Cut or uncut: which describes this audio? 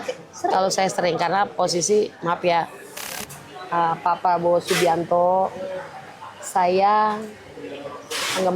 cut